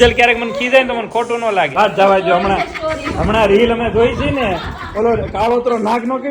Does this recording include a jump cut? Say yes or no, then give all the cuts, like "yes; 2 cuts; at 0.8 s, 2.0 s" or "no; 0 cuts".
yes; 1 cut; at 1.8 s